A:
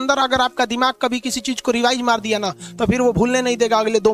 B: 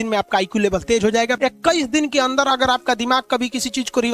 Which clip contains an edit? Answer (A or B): B